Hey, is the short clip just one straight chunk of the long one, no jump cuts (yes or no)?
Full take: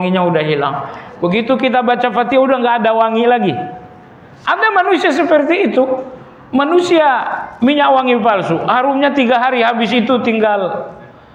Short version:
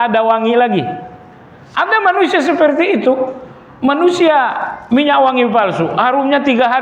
yes